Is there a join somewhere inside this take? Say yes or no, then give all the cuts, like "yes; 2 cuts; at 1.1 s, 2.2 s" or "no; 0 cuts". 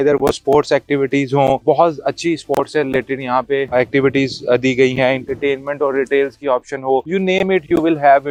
no; 0 cuts